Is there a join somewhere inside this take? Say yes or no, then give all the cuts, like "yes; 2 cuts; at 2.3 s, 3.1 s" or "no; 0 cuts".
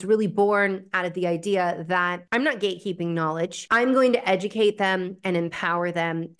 yes; 2 cuts; at 2.2 s, 3.6 s